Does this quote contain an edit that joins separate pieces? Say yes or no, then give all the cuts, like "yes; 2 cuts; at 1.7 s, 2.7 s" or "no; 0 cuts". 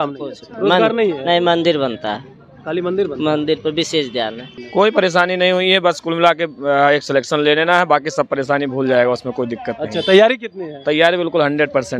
yes; 1 cut; at 4.5 s